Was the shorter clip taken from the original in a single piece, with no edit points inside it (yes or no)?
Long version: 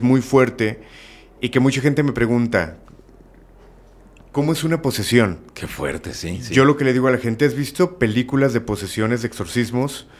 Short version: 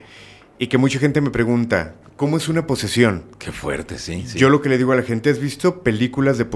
no